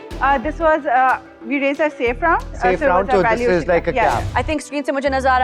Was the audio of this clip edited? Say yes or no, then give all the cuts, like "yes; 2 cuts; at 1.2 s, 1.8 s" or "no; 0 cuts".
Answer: yes; 1 cut; at 4.3 s